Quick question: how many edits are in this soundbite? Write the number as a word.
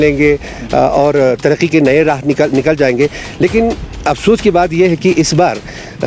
zero